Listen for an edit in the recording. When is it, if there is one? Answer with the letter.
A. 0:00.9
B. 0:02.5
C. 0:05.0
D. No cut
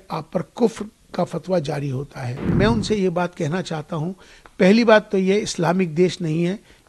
B